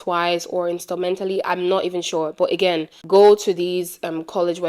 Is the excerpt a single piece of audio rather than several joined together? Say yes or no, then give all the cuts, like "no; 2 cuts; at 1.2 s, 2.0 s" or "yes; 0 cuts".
no; 1 cut; at 2.9 s